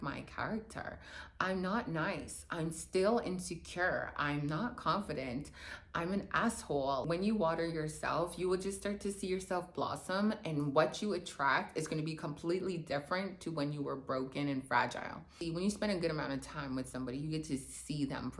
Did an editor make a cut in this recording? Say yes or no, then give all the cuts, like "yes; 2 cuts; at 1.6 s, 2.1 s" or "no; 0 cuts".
yes; 2 cuts; at 7.0 s, 15.3 s